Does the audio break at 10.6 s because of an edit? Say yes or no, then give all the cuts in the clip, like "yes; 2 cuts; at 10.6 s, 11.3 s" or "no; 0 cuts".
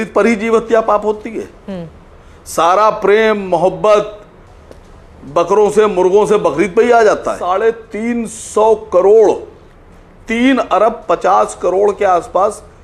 no; 1 cut; at 7.4 s